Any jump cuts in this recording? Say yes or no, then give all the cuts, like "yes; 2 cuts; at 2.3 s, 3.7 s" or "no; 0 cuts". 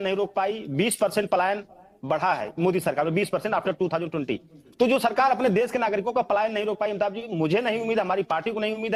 no; 0 cuts